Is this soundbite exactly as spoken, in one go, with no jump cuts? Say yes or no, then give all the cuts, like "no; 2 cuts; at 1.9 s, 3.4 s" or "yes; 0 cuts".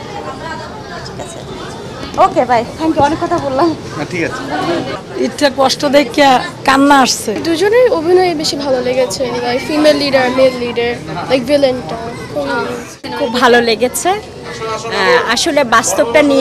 no; 3 cuts; at 5.0 s, 7.3 s, 12.9 s